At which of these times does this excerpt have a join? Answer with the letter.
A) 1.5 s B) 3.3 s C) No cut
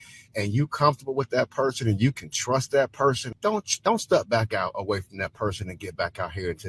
B